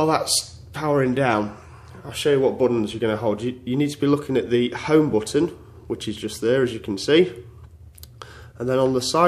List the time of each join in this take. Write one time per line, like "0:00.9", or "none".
none